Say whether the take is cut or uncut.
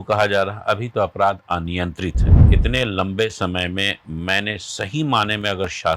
cut